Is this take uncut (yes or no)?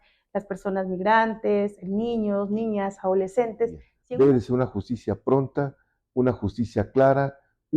no